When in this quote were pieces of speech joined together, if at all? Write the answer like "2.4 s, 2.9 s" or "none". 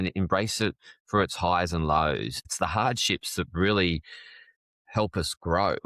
2.4 s